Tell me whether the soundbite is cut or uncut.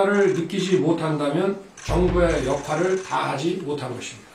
cut